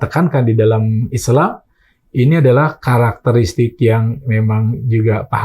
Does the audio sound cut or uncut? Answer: uncut